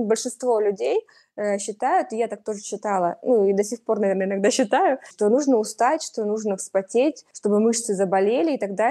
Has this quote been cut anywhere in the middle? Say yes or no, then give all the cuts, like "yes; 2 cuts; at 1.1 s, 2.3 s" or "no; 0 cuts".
yes; 2 cuts; at 5.1 s, 7.3 s